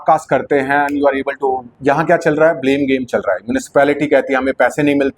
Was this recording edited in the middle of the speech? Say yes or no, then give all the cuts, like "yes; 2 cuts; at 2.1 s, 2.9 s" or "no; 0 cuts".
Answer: yes; 1 cut; at 1.7 s